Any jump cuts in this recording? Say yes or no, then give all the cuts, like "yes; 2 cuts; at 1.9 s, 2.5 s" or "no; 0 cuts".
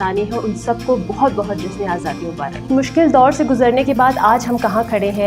yes; 1 cut; at 2.6 s